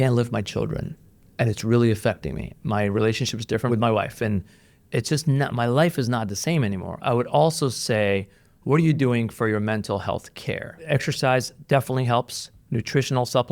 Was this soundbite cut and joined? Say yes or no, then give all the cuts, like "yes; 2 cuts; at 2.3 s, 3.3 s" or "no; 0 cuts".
yes; 2 cuts; at 3.7 s, 10.7 s